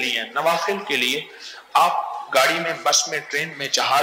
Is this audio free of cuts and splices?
yes; 0 cuts

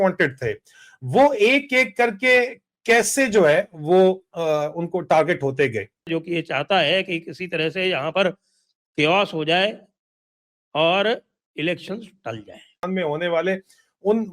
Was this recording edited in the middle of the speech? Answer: yes; 2 cuts; at 6.1 s, 12.7 s

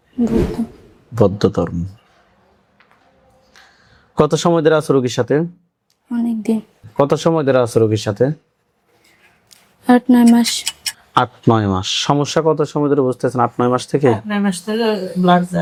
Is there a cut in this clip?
no; 0 cuts

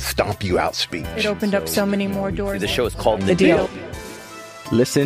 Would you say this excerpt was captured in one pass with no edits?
yes; 0 cuts

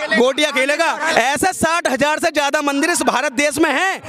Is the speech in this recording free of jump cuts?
no; 1 cut; at 1.1 s

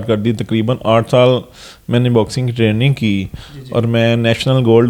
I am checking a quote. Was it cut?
no; 0 cuts

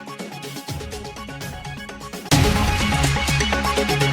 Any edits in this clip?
yes; 1 cut; at 2.3 s

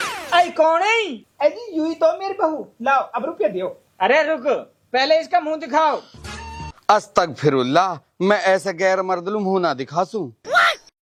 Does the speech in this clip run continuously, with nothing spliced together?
yes; 0 cuts

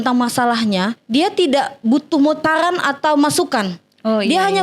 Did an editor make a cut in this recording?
yes; 1 cut; at 1.0 s

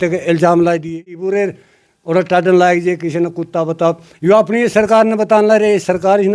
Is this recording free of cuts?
no; 1 cut; at 1.1 s

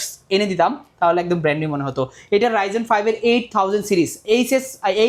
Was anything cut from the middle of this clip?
no; 0 cuts

